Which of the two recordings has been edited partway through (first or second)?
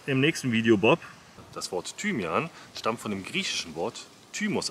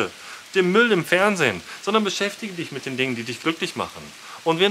first